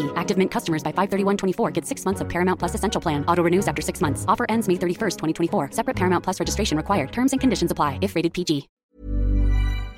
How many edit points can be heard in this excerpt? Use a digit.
1